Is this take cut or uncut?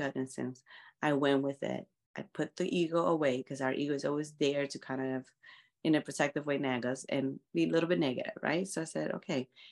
uncut